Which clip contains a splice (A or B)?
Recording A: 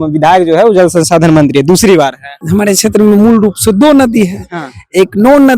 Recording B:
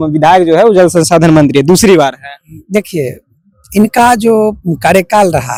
A